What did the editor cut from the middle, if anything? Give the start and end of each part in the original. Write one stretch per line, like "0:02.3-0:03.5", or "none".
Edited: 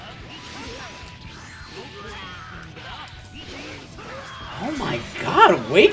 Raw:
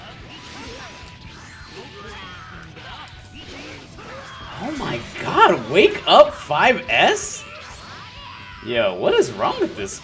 none